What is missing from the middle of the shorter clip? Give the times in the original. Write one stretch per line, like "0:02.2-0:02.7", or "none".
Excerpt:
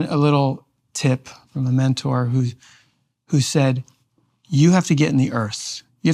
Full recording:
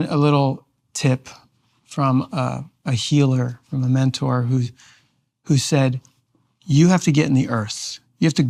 0:01.4-0:03.6